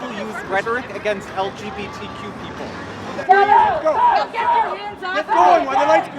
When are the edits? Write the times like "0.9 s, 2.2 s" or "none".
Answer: 3.1 s